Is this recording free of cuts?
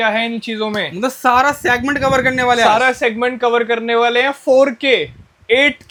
yes; 0 cuts

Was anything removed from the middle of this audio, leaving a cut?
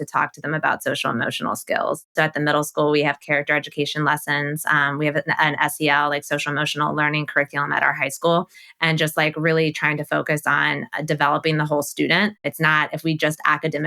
yes; 3 cuts; at 2.1 s, 8.6 s, 12.5 s

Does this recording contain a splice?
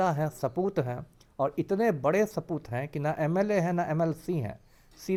no; 0 cuts

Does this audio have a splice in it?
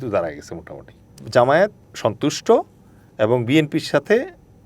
yes; 2 cuts; at 1.2 s, 1.8 s

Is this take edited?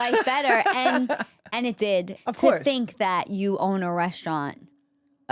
yes; 1 cut; at 2.1 s

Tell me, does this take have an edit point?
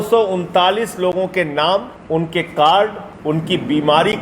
yes; 2 cuts; at 2.0 s, 3.1 s

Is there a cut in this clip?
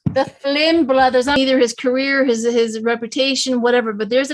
yes; 1 cut; at 1.4 s

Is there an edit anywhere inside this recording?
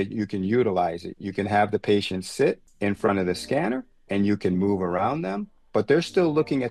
no; 0 cuts

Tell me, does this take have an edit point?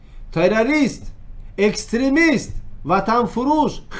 no; 0 cuts

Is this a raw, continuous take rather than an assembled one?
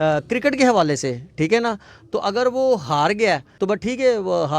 no; 1 cut; at 3.5 s

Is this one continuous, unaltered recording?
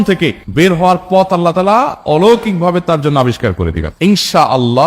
no; 1 cut; at 3.9 s

